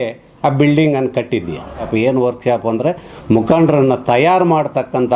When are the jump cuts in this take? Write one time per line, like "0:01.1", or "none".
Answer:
0:01.9